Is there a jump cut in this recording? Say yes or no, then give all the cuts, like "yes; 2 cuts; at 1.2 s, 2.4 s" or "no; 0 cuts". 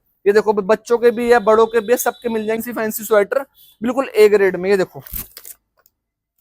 yes; 1 cut; at 2.6 s